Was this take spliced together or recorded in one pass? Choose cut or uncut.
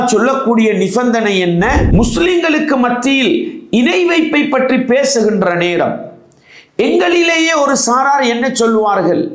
cut